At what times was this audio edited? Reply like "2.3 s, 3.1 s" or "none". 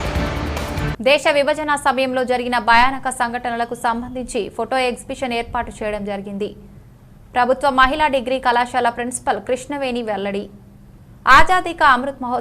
0.9 s